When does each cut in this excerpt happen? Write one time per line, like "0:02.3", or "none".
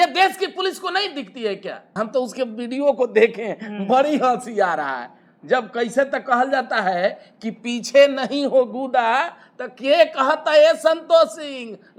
none